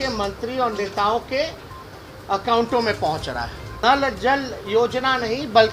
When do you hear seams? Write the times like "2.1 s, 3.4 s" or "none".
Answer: 3.6 s